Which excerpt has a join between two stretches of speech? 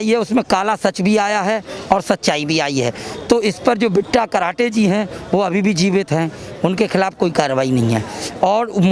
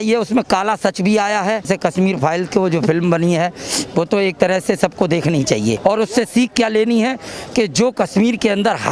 second; 2 cuts; at 1.7 s, 5.8 s

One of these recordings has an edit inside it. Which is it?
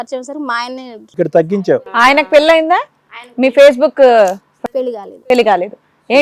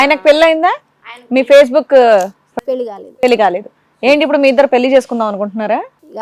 first; 1 cut; at 1.0 s

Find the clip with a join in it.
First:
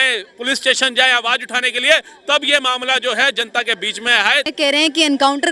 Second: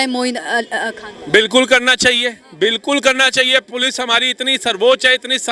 first; 1 cut; at 4.5 s

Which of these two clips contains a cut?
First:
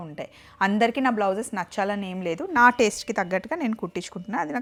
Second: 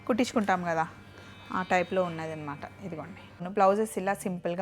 second; 1 cut; at 3.5 s

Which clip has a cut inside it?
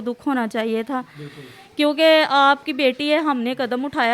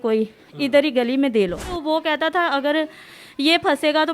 second; 1 cut; at 1.7 s

